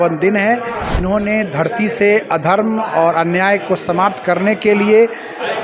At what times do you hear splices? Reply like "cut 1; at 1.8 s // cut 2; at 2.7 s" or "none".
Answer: cut 1; at 1.0 s